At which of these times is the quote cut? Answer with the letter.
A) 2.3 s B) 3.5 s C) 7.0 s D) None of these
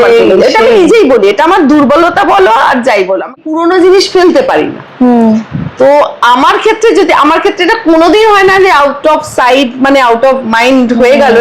B